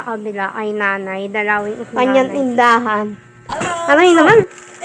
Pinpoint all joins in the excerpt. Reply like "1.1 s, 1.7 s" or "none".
1.8 s, 3.7 s